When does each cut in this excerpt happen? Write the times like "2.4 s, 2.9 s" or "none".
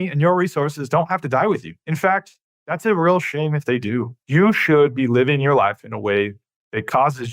none